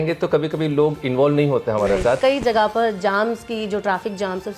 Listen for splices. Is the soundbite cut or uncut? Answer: cut